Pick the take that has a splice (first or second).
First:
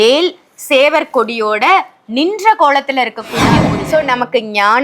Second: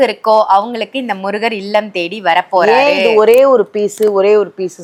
first